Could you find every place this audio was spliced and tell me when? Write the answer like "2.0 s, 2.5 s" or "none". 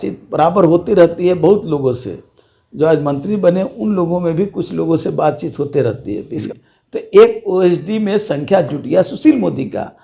6.3 s